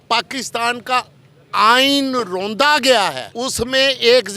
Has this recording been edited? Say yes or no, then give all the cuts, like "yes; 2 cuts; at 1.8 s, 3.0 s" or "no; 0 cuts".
yes; 1 cut; at 3.3 s